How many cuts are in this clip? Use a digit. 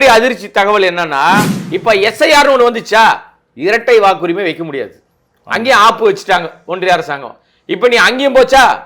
1